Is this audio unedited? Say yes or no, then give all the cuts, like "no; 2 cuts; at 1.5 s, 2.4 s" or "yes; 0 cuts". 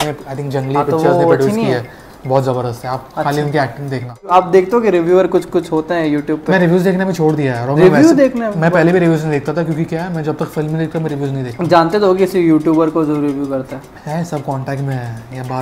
no; 1 cut; at 4.2 s